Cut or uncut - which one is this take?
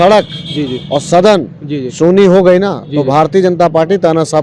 uncut